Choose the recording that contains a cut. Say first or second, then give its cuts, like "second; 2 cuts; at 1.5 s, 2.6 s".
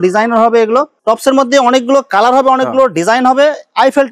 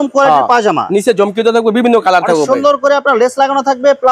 first; 1 cut; at 0.9 s